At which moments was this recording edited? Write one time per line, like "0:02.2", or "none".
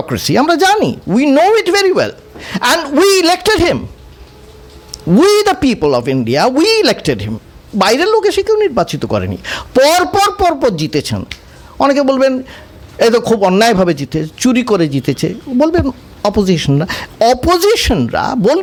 none